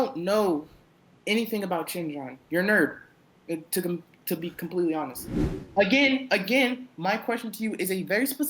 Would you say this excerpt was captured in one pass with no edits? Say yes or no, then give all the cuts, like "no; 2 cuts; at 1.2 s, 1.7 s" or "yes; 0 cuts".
no; 1 cut; at 5.5 s